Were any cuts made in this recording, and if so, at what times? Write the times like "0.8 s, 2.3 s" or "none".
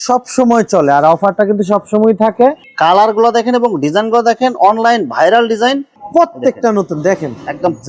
2.6 s, 5.9 s